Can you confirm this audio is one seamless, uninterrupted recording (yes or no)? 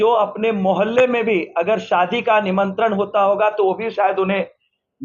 yes